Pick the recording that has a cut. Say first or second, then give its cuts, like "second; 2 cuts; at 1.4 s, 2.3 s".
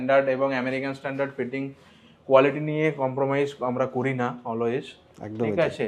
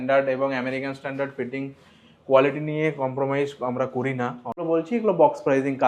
second; 1 cut; at 4.6 s